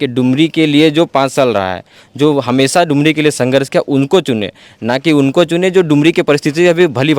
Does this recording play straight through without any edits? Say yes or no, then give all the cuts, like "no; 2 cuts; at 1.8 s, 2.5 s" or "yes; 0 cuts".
yes; 0 cuts